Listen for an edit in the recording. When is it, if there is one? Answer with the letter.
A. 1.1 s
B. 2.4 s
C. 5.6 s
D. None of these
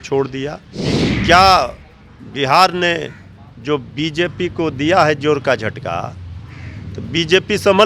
A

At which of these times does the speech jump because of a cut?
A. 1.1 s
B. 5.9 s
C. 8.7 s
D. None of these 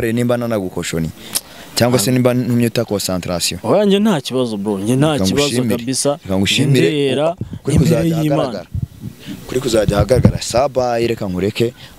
D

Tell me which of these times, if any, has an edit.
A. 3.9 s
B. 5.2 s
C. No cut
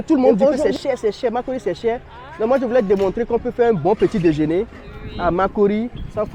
C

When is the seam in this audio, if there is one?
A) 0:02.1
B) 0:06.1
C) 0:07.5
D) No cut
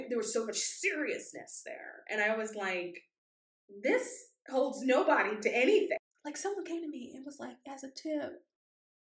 B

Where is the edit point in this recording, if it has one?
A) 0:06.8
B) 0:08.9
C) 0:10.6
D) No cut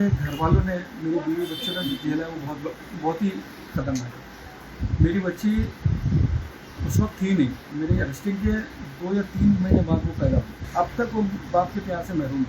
C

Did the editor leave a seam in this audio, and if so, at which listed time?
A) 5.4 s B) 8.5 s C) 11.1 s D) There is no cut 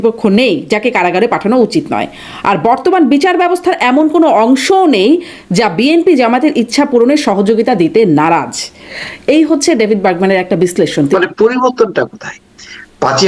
C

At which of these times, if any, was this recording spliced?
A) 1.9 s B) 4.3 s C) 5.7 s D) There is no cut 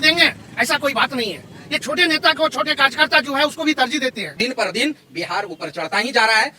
B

